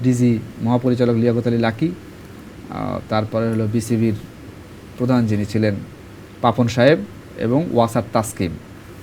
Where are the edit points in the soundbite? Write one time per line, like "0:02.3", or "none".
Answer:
none